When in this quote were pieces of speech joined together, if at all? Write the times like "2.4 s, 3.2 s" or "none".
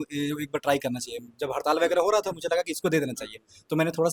none